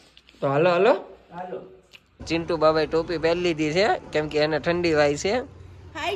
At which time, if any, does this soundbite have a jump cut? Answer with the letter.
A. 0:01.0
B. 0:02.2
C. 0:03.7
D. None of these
B